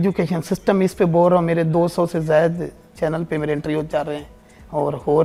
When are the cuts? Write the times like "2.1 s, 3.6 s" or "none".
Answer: none